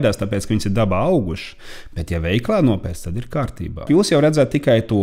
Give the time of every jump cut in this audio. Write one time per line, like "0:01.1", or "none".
0:03.9